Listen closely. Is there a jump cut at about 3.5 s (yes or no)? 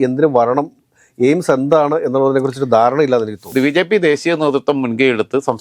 yes